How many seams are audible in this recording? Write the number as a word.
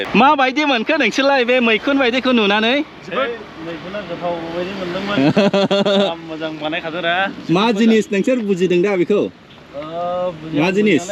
zero